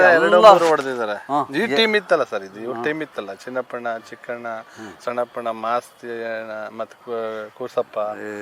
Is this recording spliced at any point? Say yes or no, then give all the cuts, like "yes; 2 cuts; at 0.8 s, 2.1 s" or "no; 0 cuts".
no; 0 cuts